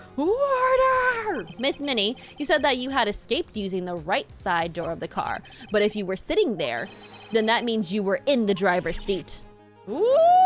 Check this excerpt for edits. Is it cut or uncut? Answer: cut